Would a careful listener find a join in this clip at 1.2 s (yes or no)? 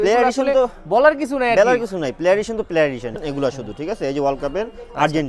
no